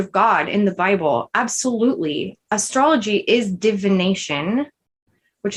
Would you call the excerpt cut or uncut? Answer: uncut